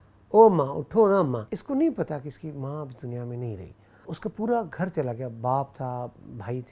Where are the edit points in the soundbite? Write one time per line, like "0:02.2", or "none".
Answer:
0:01.5
0:03.9

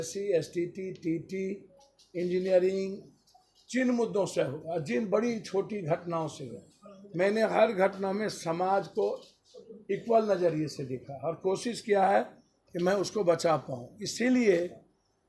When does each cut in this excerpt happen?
none

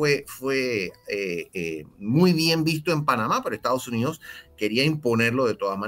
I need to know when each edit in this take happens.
none

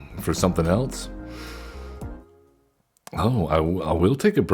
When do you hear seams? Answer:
0:02.2

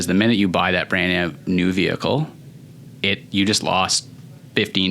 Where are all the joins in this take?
none

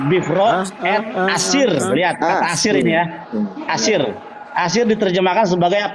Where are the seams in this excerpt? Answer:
none

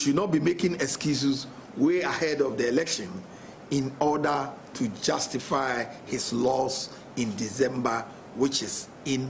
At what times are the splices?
none

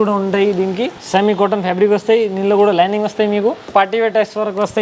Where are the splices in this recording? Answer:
0:01.0
0:03.7

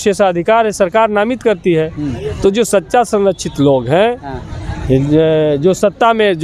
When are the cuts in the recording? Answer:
none

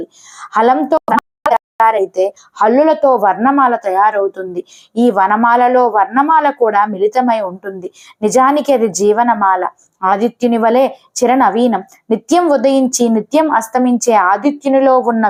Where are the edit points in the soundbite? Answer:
none

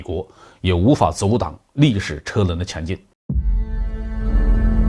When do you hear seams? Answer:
0:03.1

